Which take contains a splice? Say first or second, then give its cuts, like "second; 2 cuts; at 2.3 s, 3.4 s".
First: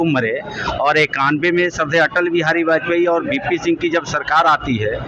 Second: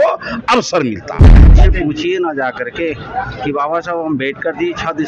second; 1 cut; at 1.5 s